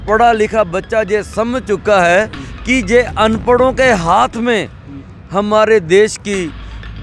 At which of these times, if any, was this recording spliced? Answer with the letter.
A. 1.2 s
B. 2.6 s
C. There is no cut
C